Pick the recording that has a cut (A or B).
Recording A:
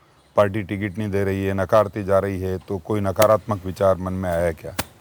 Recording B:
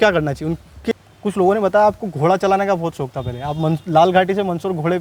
B